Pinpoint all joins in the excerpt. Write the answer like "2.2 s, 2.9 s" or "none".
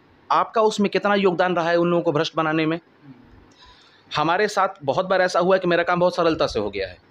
none